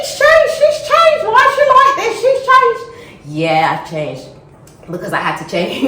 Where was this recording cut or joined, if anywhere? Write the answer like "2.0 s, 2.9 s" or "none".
none